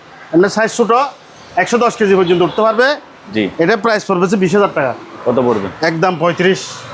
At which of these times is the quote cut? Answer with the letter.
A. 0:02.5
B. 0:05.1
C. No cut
B